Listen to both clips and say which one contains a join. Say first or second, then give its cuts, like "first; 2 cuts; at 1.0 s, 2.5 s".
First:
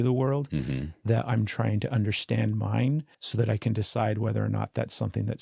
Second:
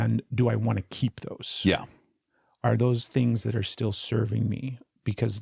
first; 1 cut; at 3.2 s